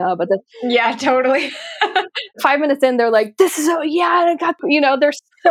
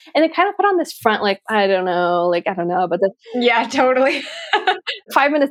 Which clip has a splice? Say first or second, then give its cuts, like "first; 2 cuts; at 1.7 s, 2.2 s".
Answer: first; 1 cut; at 4.6 s